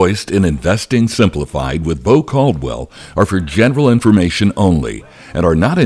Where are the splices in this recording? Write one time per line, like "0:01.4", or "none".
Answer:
none